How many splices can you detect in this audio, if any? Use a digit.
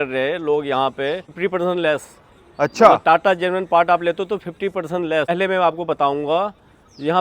2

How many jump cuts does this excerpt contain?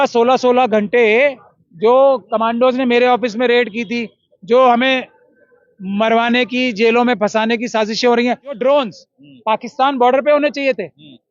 1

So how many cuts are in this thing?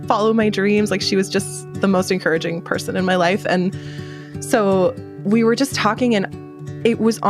1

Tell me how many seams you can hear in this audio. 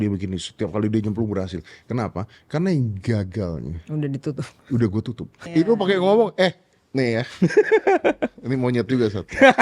1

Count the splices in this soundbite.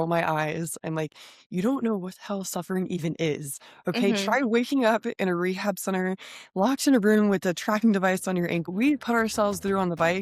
1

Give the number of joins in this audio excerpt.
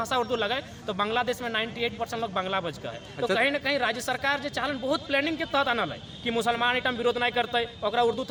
0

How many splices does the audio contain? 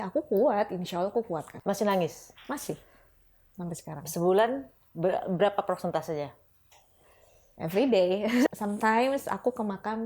2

